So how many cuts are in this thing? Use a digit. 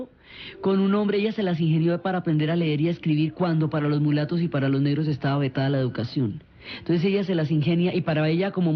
1